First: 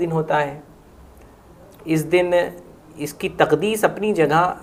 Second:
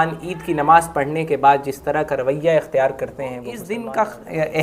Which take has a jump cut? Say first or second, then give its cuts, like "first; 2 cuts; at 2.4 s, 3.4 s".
second; 1 cut; at 3.7 s